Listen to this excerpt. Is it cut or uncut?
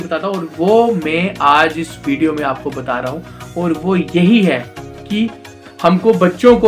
cut